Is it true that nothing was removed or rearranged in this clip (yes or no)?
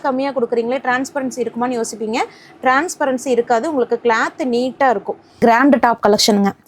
no